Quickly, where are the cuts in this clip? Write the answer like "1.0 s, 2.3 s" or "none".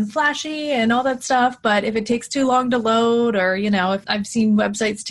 none